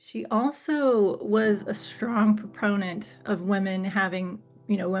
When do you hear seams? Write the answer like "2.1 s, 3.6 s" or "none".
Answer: none